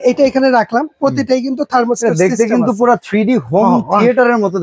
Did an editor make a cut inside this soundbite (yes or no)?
no